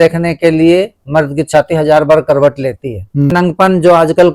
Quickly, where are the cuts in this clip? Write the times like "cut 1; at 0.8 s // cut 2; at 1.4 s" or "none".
cut 1; at 3.3 s